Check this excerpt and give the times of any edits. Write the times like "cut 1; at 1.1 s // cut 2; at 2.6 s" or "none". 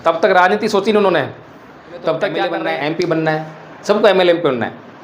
cut 1; at 2.6 s